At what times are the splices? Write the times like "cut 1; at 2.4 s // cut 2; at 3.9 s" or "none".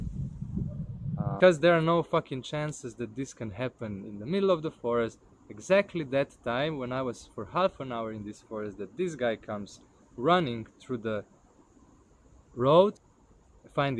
cut 1; at 1.4 s // cut 2; at 13.0 s